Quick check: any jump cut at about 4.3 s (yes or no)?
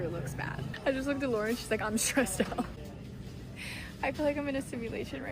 no